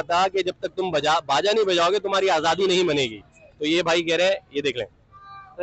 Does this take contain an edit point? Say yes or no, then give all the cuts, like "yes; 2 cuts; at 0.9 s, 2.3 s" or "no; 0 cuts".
no; 0 cuts